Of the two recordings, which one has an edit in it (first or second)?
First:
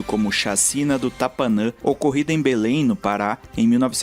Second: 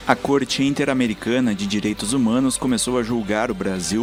first